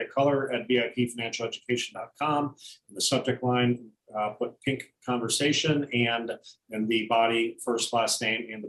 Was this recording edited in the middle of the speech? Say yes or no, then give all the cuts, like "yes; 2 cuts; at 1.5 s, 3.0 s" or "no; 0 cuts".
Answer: no; 0 cuts